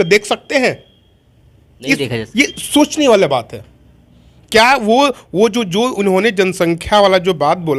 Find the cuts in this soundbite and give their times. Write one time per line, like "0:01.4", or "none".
none